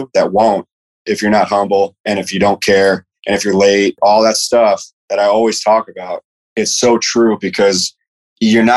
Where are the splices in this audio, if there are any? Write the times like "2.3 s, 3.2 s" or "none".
4.0 s, 5.0 s